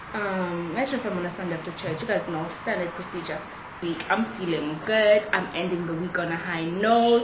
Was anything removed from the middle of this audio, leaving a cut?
yes; 1 cut; at 3.7 s

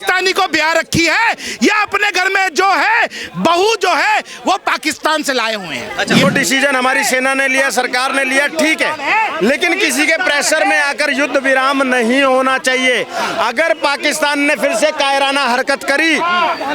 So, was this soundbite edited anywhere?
yes; 1 cut; at 6.2 s

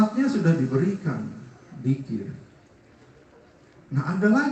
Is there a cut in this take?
no; 0 cuts

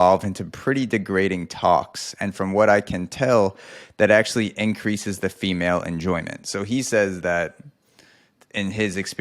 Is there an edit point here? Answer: no; 0 cuts

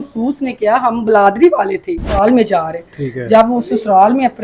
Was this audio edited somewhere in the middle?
yes; 1 cut; at 2.1 s

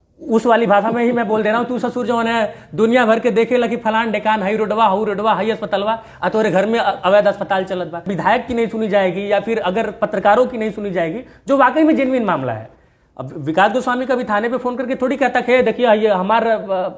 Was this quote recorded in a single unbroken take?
no; 1 cut; at 8.1 s

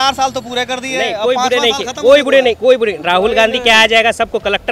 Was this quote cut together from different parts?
no; 0 cuts

